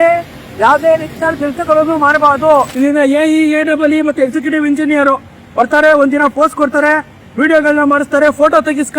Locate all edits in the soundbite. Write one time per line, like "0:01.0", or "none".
0:02.7